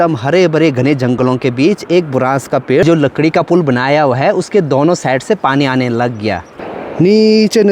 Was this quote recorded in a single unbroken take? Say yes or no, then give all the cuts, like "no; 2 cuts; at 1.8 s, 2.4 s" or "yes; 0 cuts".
no; 2 cuts; at 2.8 s, 6.5 s